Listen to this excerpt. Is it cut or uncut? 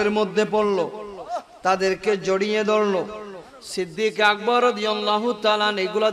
uncut